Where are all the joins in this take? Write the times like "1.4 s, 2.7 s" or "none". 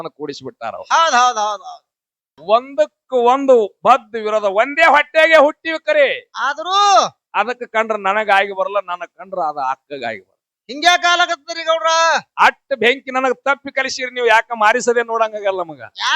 2.4 s